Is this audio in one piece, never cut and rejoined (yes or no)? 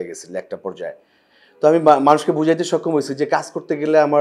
yes